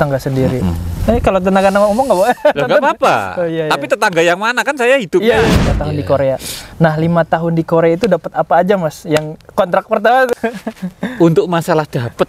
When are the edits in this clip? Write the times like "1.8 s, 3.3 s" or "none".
5.7 s, 10.3 s